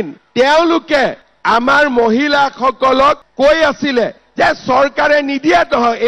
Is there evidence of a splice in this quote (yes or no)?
yes